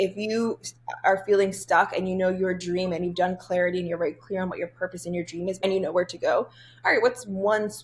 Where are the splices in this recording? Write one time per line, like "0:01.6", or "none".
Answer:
0:05.6